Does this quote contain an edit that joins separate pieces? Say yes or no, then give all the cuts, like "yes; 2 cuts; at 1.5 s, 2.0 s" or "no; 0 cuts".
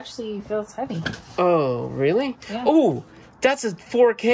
no; 0 cuts